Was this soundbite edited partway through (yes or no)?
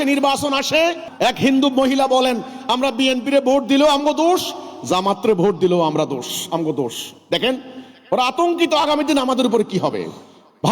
yes